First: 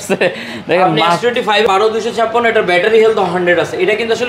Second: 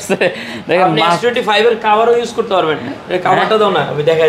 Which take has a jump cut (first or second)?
first